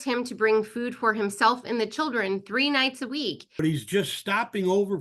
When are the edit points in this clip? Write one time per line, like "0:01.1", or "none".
0:03.6